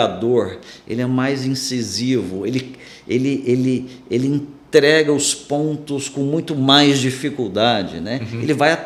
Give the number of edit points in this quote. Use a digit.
0